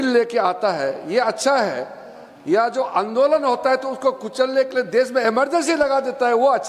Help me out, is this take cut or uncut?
uncut